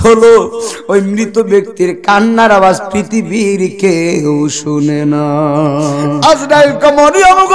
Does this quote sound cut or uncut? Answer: cut